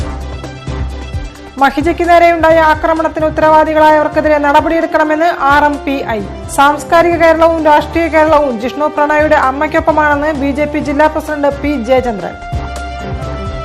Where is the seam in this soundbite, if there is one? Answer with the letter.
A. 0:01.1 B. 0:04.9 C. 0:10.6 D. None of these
A